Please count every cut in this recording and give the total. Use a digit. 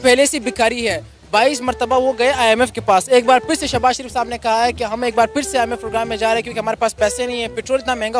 0